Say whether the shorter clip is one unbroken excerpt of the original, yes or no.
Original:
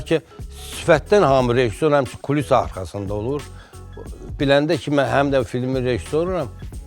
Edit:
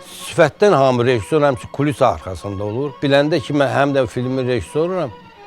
no